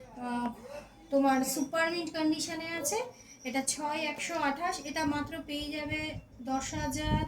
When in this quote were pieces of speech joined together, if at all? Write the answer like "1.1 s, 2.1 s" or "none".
none